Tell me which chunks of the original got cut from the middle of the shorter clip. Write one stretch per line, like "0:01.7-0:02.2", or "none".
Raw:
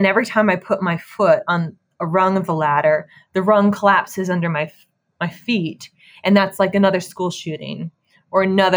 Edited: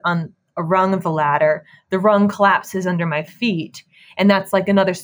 0:04.7-0:05.4